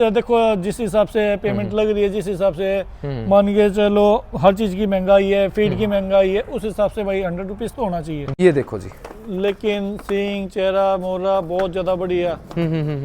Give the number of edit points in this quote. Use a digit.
1